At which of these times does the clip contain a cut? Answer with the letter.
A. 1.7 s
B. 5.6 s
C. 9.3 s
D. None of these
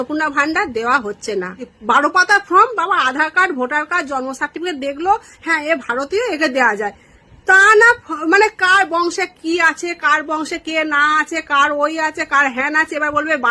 A